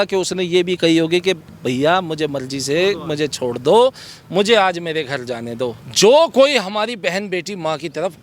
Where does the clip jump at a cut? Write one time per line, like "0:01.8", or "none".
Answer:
0:05.8